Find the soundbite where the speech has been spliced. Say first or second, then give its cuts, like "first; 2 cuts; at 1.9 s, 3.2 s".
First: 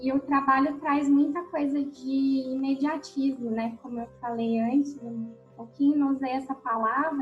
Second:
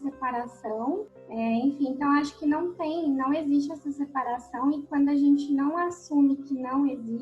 second; 1 cut; at 1.1 s